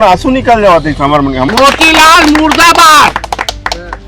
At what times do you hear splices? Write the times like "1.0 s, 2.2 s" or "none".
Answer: 1.5 s

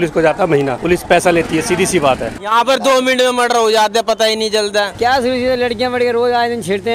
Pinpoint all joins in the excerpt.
2.3 s, 4.9 s

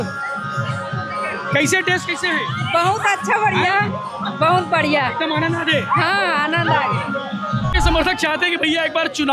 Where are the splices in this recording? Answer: 7.7 s

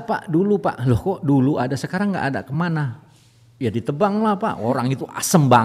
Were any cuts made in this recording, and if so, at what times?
none

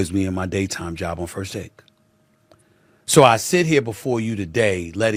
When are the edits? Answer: none

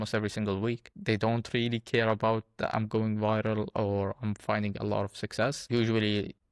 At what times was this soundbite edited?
0.9 s, 5.6 s

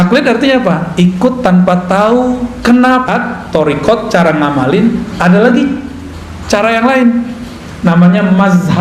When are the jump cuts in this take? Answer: 3.0 s

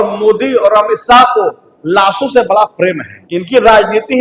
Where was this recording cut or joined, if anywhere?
3.1 s

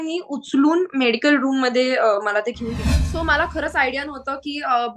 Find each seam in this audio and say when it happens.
3.0 s

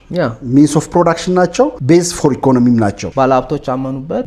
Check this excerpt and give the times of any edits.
1.8 s, 3.0 s

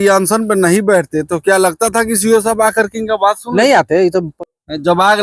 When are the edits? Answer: 4.3 s

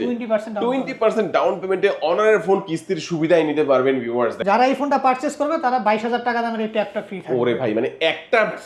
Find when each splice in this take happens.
4.4 s

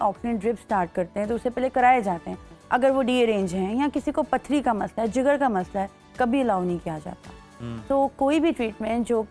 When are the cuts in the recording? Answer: none

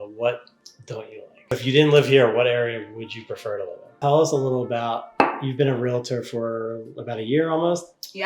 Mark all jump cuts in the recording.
1.5 s, 4.0 s

